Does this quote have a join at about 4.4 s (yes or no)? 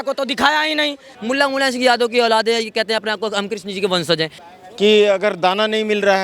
yes